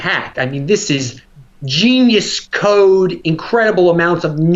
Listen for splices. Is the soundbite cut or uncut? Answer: uncut